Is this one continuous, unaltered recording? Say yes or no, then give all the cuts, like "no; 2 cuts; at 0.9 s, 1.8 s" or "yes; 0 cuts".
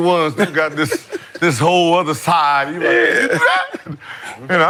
yes; 0 cuts